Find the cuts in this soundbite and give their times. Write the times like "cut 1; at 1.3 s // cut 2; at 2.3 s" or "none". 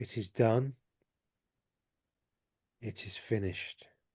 cut 1; at 2.2 s